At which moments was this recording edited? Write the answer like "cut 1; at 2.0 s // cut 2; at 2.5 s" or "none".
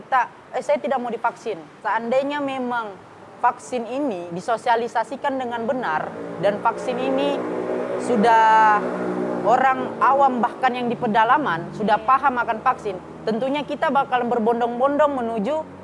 cut 1; at 1.7 s